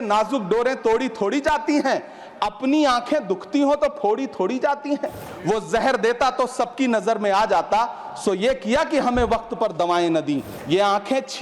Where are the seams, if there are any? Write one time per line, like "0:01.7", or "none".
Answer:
0:05.3
0:10.5